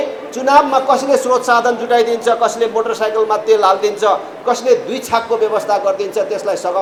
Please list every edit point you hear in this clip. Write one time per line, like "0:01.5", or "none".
none